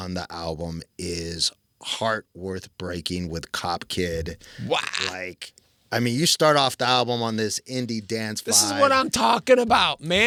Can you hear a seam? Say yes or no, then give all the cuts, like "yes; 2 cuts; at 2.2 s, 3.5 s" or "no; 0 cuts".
no; 0 cuts